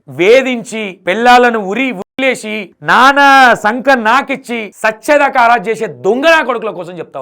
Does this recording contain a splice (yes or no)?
yes